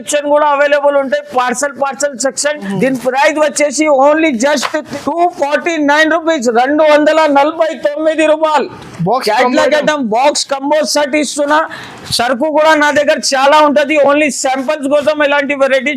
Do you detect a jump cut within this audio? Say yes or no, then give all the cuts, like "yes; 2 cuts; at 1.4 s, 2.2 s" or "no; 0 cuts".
yes; 2 cuts; at 2.6 s, 4.9 s